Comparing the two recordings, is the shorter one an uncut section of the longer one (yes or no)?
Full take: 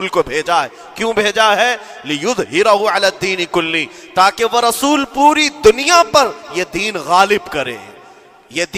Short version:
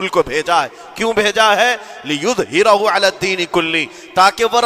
yes